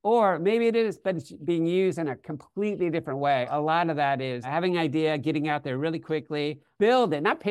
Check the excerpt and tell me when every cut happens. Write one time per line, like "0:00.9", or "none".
0:03.5
0:04.5
0:06.6